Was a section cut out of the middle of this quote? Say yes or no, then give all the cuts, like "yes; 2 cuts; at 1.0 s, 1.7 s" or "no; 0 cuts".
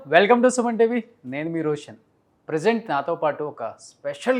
no; 0 cuts